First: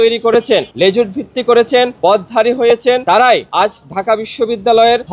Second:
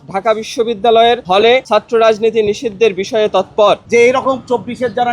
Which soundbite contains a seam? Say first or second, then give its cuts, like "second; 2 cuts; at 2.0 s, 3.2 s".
second; 1 cut; at 3.8 s